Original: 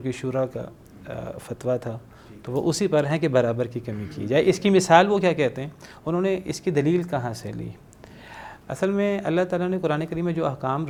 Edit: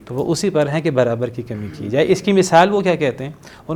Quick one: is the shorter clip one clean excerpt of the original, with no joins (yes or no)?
yes